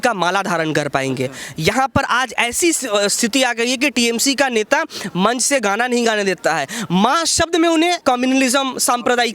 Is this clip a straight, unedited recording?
no; 1 cut; at 8.0 s

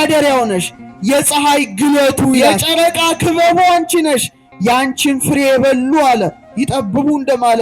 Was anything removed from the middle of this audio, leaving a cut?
yes; 1 cut; at 2.5 s

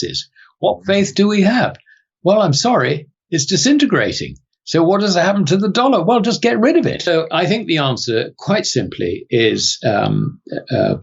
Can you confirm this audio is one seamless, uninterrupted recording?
no; 1 cut; at 7.1 s

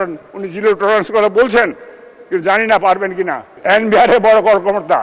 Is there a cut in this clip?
yes; 1 cut; at 3.5 s

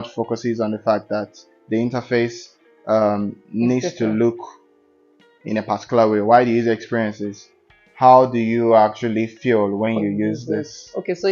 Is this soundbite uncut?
yes; 0 cuts

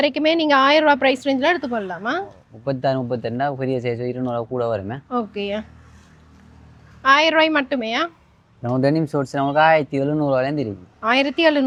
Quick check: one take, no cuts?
yes; 0 cuts

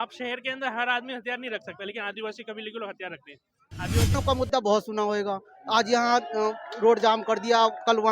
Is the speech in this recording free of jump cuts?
no; 1 cut; at 4.1 s

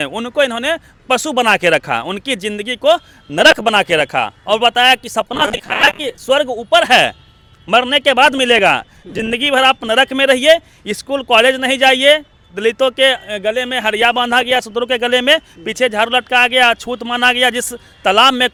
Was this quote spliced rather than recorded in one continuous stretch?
no; 0 cuts

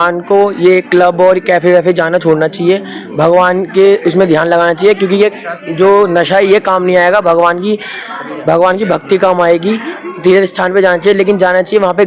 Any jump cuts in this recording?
no; 0 cuts

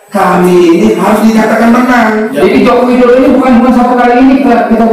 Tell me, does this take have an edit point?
yes; 1 cut; at 2.3 s

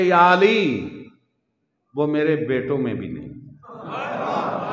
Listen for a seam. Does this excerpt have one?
no; 0 cuts

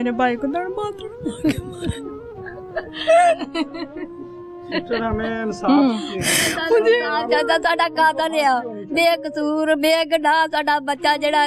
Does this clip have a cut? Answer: no; 0 cuts

